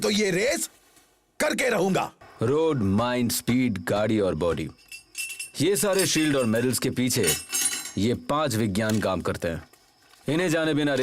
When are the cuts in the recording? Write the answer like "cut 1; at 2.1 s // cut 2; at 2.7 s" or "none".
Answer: cut 1; at 2.2 s